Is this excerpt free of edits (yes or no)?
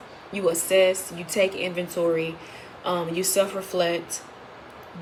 yes